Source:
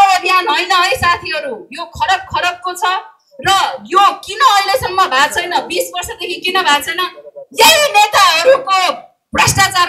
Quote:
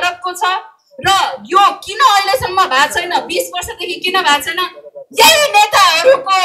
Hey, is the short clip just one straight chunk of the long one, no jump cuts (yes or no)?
yes